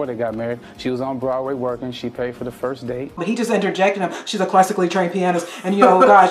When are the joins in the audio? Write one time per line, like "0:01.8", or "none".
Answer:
0:03.2